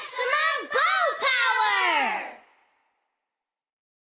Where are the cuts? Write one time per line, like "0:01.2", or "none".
0:02.0

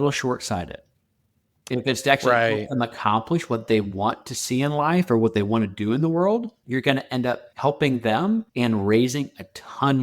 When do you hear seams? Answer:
0:06.6
0:07.5
0:08.5

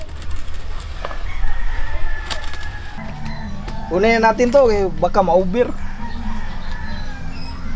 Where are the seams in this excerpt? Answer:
0:03.0

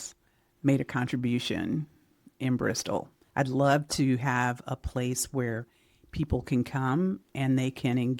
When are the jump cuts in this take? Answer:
0:03.2

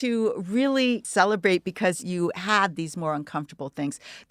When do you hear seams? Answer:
0:01.1

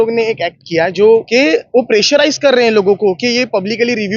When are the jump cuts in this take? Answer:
0:01.3

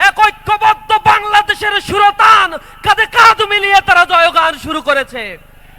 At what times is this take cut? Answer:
none

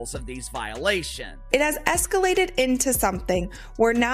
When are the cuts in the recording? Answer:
0:01.5

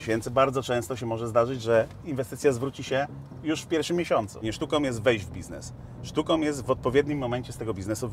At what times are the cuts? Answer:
0:04.4

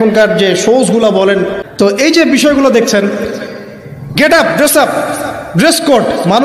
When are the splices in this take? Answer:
0:01.6

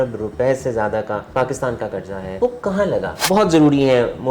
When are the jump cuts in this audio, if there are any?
0:01.3
0:02.3
0:03.1

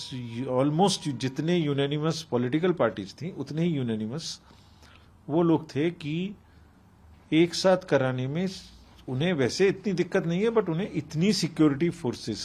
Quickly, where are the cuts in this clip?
none

